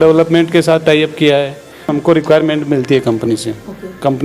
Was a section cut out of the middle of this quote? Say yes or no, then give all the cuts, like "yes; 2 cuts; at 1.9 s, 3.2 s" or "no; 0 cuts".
yes; 1 cut; at 1.9 s